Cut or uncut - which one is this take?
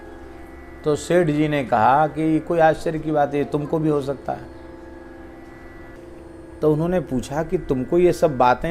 cut